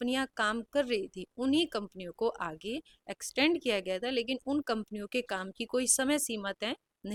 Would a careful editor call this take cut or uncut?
uncut